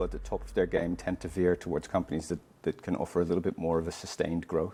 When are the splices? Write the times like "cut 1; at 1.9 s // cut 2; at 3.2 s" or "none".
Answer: none